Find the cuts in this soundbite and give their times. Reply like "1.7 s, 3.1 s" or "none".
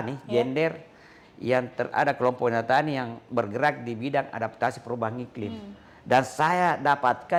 none